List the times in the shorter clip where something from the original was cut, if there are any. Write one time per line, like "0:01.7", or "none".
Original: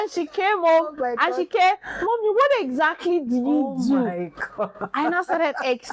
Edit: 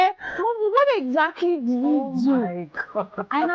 none